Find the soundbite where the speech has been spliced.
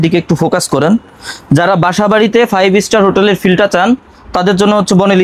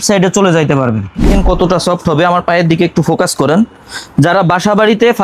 second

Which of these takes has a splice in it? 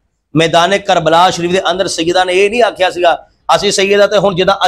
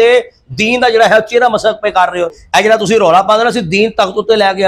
second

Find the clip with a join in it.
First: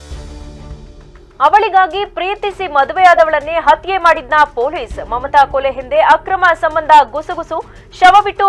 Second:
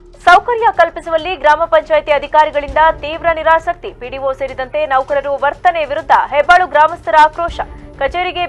first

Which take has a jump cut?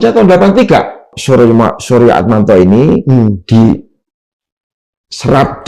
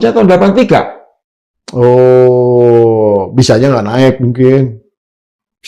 first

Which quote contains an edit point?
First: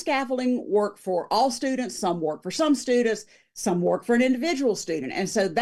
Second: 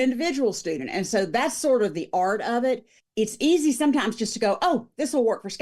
second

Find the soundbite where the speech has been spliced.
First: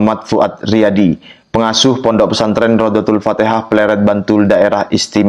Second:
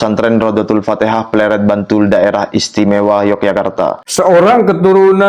second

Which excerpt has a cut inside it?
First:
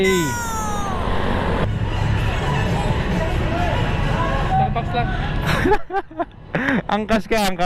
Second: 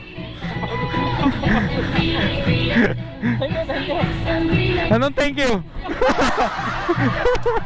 first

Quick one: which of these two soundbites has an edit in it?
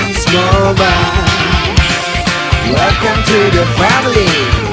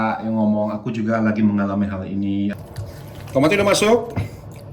second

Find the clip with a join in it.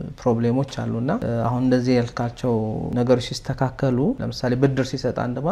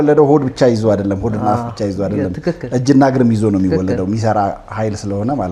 first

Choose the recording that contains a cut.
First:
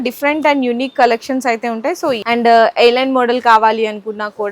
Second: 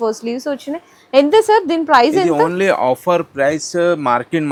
first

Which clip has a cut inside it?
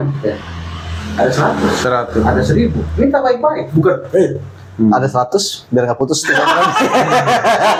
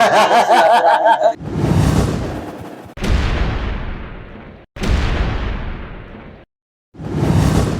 second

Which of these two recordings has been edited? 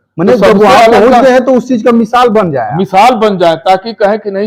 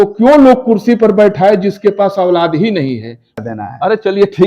second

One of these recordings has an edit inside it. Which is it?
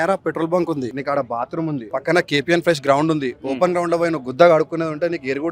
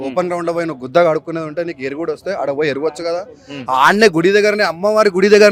first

